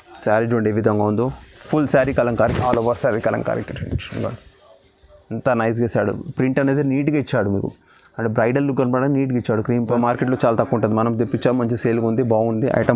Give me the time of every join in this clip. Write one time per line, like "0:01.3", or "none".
0:09.9